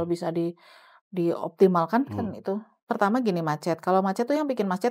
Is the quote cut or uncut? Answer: cut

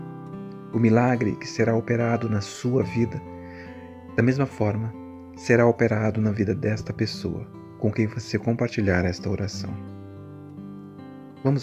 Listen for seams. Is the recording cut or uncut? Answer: uncut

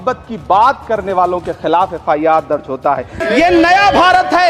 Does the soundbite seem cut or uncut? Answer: cut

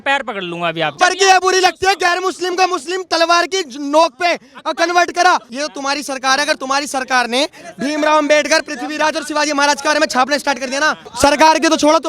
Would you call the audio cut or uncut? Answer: cut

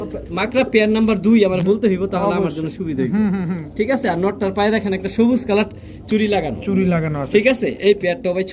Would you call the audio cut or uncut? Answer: uncut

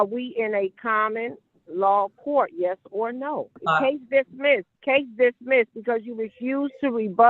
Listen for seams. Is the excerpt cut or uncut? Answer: cut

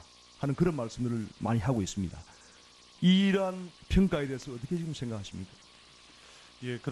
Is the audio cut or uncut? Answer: cut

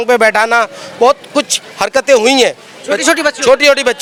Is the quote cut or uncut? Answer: uncut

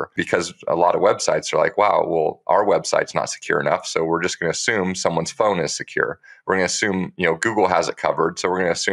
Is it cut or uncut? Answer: uncut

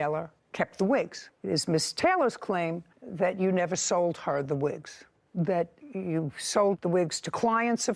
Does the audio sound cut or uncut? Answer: uncut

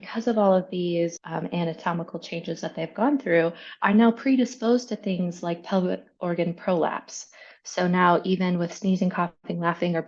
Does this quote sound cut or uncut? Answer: cut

